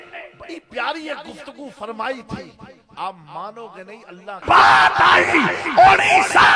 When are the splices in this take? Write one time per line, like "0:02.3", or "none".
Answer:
0:04.4